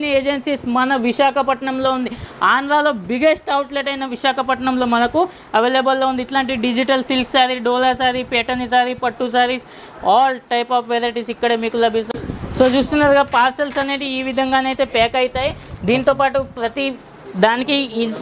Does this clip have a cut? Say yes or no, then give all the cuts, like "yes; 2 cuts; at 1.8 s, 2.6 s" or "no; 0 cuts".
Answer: no; 0 cuts